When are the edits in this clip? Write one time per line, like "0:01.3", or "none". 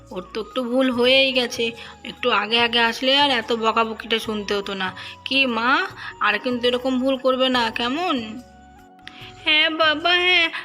none